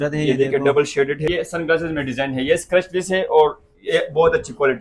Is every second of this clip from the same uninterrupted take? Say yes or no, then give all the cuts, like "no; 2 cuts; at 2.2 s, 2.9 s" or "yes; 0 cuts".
no; 1 cut; at 1.3 s